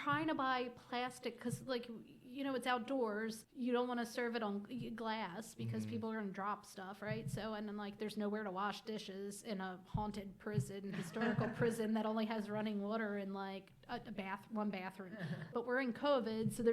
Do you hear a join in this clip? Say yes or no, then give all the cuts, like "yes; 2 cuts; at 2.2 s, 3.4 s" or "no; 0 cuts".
yes; 2 cuts; at 3.4 s, 15.4 s